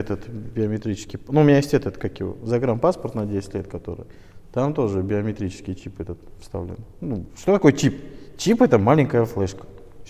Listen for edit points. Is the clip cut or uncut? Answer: uncut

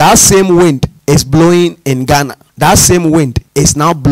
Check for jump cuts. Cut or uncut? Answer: uncut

